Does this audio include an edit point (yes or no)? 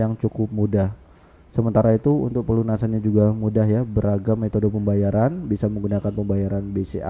no